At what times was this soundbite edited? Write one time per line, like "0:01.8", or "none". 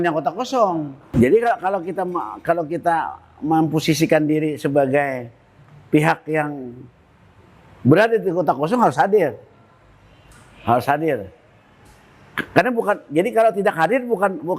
0:01.1